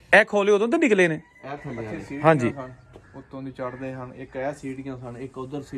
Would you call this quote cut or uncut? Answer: cut